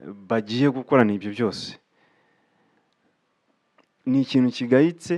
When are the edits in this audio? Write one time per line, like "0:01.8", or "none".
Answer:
none